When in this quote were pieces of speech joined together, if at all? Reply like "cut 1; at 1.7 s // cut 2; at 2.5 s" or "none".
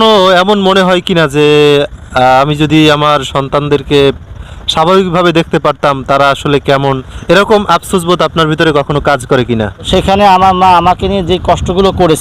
cut 1; at 7.1 s // cut 2; at 9.9 s